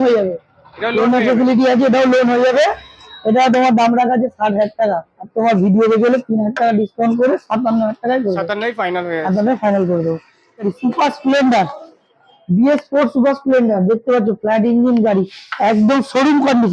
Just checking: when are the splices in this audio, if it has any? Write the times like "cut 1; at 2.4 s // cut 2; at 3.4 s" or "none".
cut 1; at 10.6 s